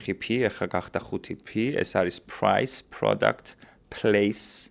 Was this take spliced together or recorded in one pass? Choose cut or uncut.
uncut